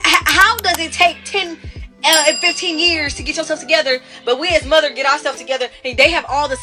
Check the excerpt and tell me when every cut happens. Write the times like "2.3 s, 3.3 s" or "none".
none